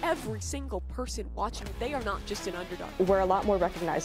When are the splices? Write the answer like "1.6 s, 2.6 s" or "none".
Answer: 2.8 s